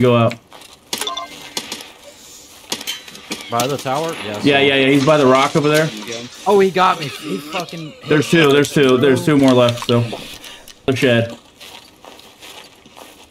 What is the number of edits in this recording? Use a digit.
1